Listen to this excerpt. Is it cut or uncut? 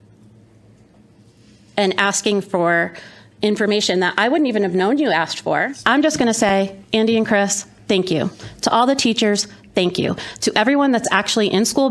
cut